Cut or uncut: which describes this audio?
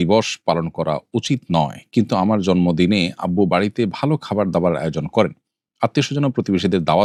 uncut